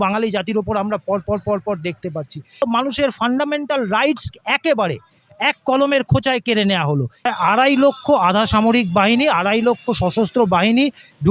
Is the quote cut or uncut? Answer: cut